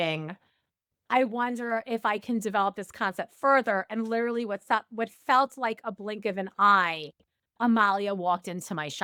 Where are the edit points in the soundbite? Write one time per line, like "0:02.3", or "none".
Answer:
none